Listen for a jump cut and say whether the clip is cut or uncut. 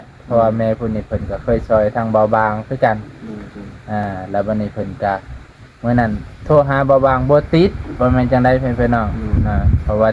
uncut